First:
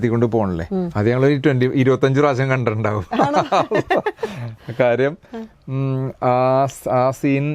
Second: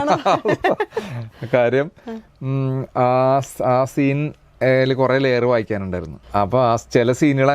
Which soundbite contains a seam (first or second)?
second